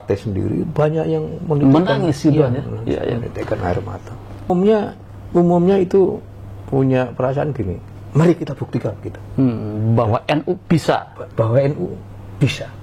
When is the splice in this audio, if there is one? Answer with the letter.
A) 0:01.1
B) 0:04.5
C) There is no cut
B